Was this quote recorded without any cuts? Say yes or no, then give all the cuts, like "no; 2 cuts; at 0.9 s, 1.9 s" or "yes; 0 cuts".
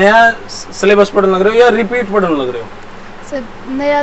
yes; 0 cuts